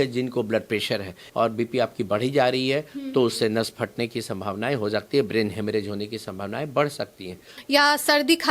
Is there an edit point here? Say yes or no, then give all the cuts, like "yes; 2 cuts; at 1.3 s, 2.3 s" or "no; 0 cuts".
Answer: yes; 2 cuts; at 1.2 s, 7.5 s